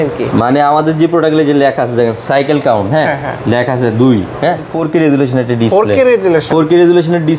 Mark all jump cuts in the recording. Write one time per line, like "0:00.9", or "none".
0:04.7